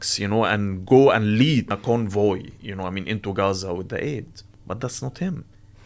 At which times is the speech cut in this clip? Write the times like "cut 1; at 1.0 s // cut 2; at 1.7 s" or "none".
cut 1; at 1.7 s // cut 2; at 4.6 s